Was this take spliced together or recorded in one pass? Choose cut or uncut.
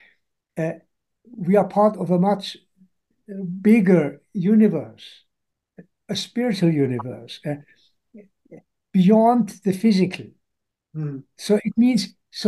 uncut